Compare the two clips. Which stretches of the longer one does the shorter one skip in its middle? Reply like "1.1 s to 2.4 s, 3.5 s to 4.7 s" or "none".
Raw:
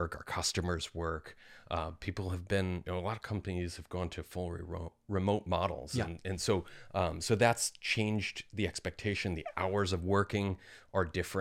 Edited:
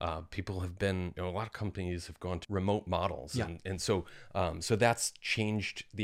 4.1 s to 5.0 s

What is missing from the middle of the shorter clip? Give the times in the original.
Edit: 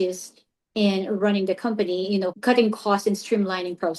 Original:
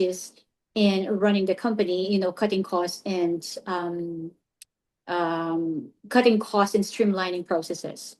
2.3 s to 6.0 s

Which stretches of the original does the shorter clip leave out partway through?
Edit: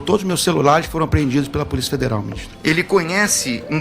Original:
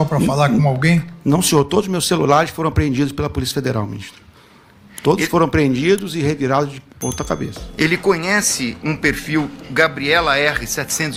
4.1 s to 7.6 s

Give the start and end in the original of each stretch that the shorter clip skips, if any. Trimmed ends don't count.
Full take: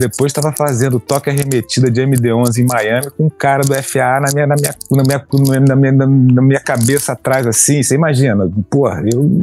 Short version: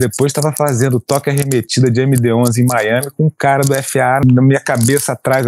4.2 s to 6.2 s

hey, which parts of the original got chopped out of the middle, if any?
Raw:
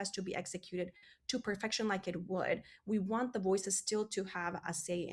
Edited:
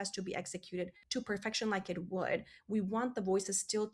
1.0 s to 1.2 s

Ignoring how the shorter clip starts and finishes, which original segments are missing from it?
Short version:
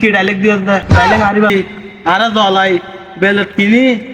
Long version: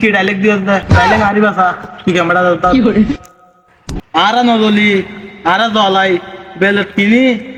1.5 s to 4.9 s

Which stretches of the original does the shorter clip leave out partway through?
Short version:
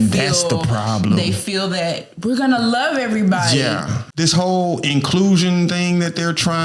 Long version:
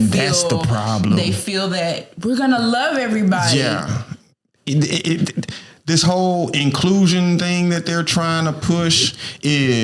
4.0 s to 5.7 s

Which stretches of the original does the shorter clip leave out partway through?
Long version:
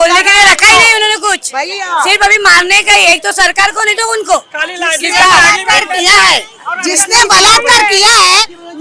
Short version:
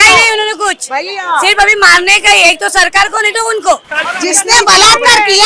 4.6 s to 6.6 s

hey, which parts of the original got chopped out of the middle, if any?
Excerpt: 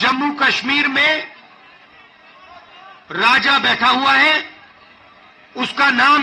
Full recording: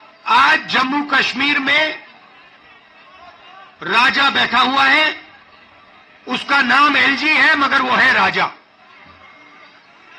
none

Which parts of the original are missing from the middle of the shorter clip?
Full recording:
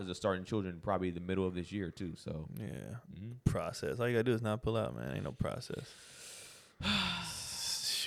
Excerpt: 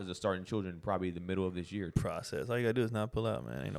1.9 s to 3.4 s

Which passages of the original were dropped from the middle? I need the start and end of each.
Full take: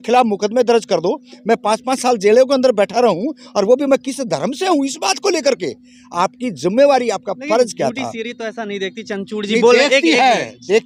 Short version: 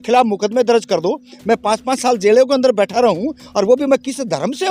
none

